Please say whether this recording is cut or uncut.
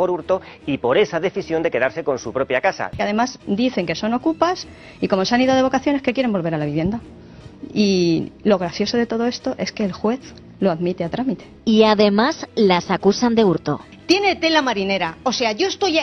cut